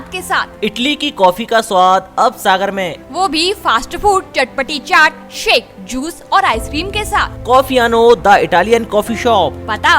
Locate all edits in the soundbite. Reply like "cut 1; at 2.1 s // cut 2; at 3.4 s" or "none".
none